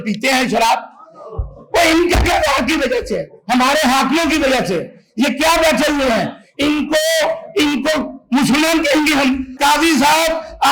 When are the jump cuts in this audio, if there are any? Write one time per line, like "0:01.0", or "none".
0:09.5